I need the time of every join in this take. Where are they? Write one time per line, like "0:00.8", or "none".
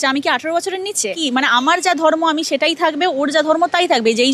0:01.0

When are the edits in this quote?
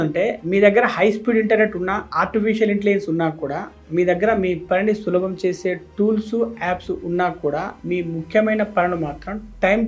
none

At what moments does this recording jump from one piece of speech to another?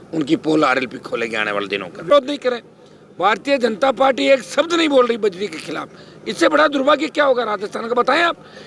0:02.1

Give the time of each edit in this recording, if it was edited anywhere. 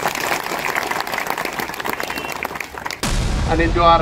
0:03.0

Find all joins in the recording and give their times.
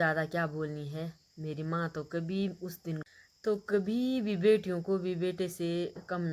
0:03.0

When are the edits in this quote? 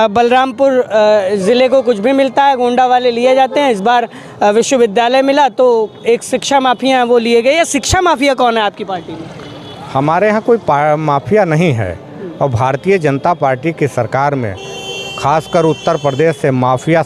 none

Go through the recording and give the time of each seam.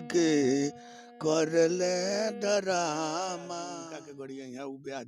0:04.0

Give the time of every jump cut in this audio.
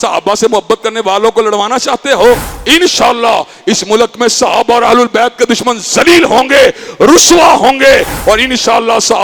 none

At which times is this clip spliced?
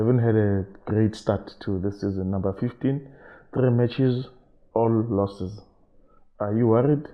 none

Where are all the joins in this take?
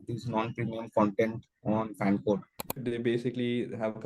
0:02.8

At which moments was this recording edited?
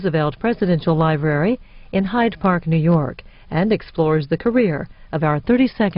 0:02.0

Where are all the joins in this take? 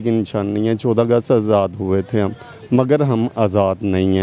none

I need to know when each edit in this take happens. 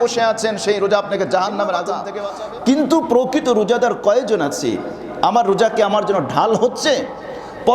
0:02.0

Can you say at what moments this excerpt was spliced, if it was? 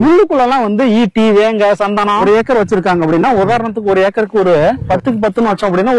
0:02.2
0:04.8

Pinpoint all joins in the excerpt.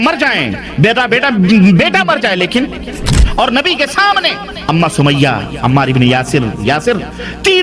0:03.2

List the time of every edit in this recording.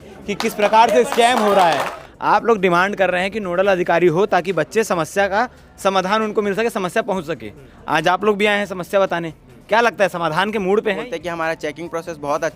0:01.9
0:11.0

